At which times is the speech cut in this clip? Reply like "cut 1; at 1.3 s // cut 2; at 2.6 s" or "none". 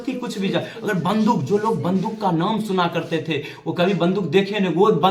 none